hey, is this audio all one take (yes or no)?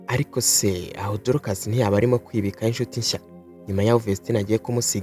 yes